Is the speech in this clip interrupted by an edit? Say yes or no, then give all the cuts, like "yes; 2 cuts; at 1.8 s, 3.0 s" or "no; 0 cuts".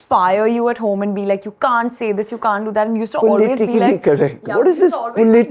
no; 0 cuts